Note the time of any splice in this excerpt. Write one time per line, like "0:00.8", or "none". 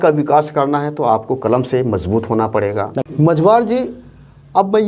0:03.0

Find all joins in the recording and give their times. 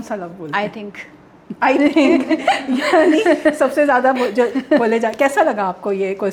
none

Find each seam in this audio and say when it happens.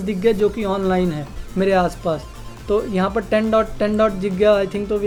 none

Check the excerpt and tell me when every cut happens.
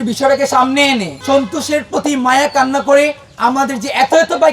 0:01.1
0:03.2

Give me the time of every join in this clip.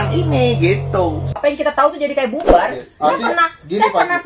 0:01.3

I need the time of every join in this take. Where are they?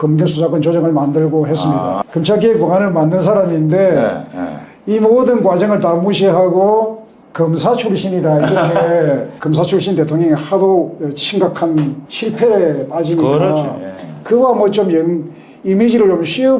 0:02.0
0:09.3

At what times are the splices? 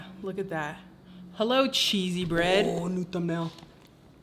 none

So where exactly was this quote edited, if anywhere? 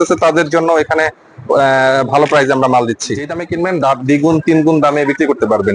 0:03.4

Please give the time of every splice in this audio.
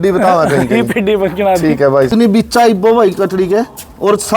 0:02.1

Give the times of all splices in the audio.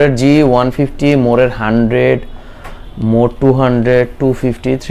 none

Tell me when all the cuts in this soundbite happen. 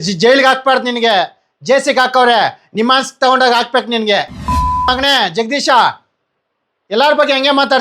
0:04.4

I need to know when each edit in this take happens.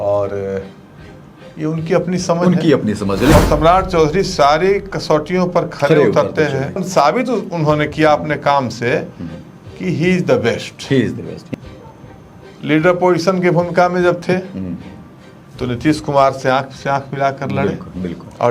0:03.3
0:06.8
0:11.4

